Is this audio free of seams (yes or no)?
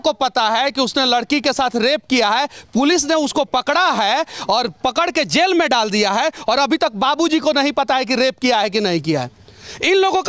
yes